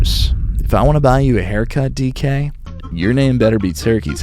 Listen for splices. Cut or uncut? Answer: cut